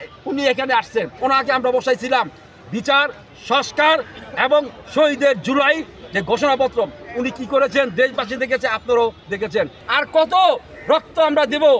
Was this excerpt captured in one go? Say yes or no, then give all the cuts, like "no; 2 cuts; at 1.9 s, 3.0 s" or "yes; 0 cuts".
no; 2 cuts; at 1.1 s, 9.8 s